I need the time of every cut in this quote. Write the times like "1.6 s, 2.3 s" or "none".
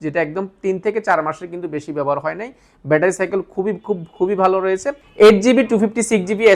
5.0 s